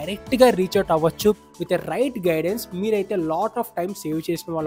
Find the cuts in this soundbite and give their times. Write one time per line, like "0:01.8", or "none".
0:01.4